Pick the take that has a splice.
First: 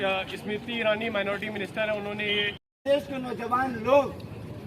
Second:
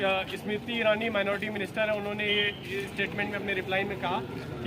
first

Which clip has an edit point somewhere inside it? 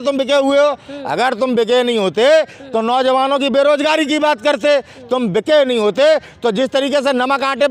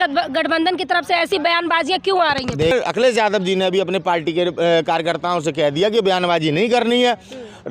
second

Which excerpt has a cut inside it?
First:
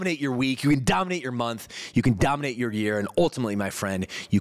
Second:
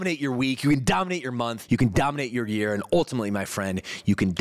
second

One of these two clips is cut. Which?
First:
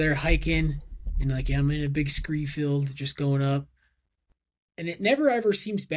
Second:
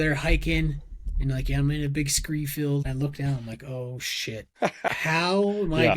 second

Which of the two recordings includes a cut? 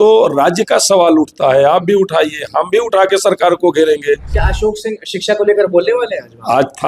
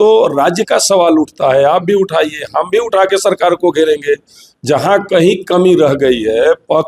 first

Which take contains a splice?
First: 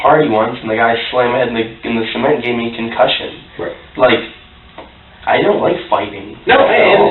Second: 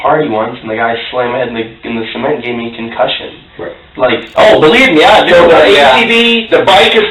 second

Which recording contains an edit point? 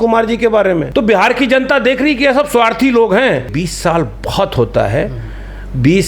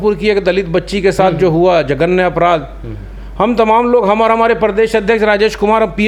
first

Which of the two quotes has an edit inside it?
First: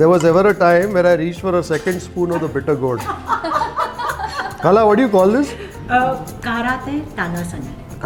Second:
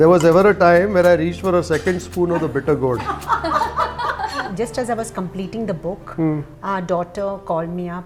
second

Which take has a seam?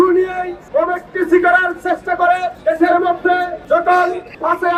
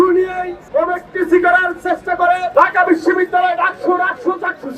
second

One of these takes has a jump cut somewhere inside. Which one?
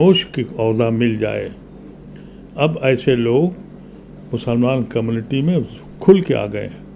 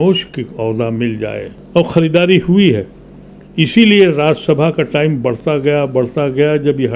second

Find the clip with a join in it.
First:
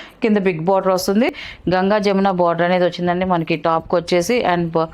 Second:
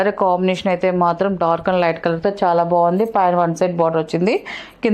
first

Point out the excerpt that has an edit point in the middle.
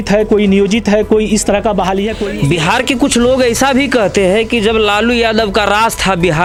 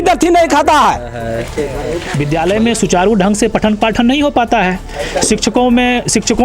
second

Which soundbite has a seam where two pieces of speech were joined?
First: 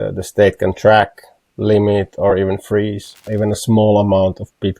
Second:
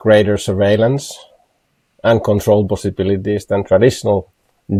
first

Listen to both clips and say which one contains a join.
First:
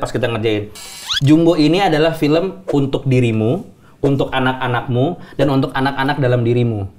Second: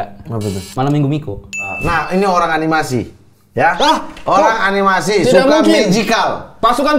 second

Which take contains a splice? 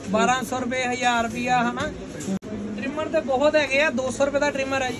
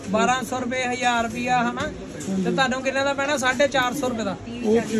first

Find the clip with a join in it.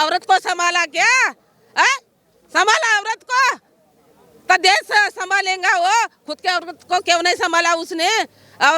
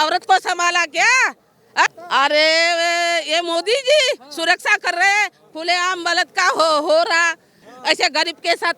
second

